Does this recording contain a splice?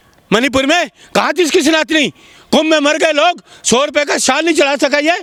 no; 0 cuts

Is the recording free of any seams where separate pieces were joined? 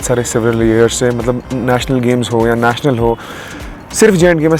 yes; 0 cuts

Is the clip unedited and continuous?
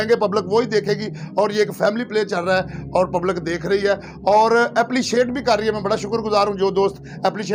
yes; 0 cuts

